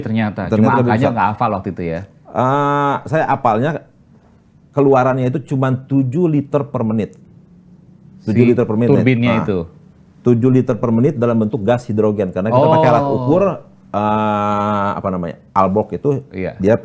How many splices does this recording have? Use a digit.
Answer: 0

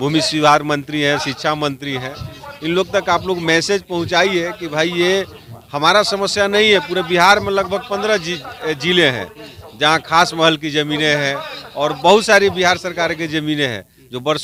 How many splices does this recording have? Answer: 0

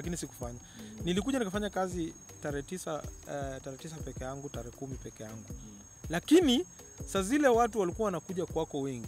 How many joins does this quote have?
0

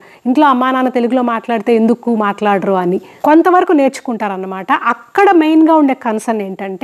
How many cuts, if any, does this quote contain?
1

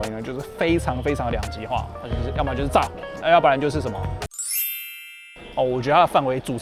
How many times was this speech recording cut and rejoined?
0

